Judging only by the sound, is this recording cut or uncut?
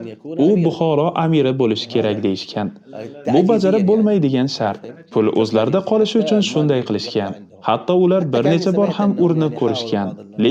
uncut